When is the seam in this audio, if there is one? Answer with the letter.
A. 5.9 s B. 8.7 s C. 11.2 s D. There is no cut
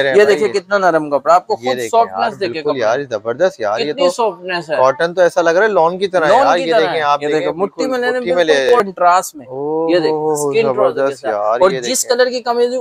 B